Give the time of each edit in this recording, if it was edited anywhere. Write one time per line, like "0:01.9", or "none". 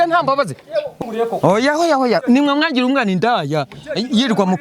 0:00.9